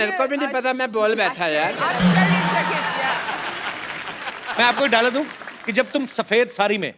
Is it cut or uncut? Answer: cut